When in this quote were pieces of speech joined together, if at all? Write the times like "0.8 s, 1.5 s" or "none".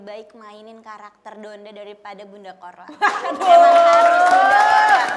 none